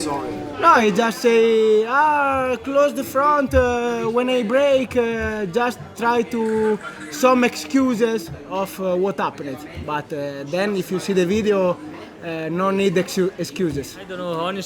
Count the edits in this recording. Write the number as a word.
zero